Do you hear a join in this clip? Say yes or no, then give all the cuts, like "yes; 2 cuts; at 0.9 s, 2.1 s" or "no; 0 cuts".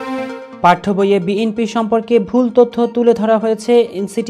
no; 0 cuts